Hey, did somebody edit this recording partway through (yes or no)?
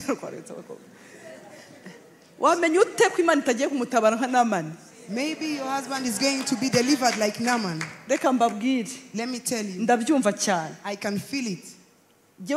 no